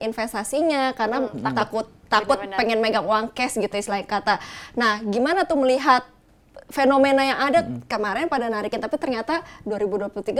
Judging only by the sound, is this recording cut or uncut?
uncut